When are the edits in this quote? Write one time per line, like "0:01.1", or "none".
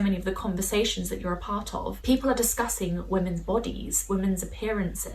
0:01.9